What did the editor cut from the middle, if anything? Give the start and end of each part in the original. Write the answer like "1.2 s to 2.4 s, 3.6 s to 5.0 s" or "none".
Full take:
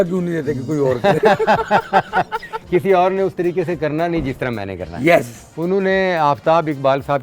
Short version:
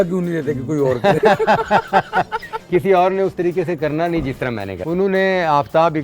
4.7 s to 5.4 s